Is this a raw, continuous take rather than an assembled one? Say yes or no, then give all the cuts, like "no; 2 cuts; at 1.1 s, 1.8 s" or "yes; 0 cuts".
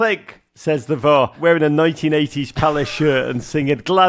no; 1 cut; at 1.3 s